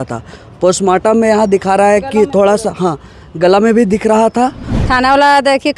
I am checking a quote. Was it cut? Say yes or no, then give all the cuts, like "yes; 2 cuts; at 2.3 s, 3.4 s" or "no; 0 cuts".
yes; 1 cut; at 4.7 s